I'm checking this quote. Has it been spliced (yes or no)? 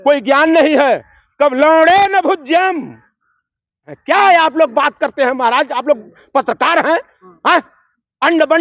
yes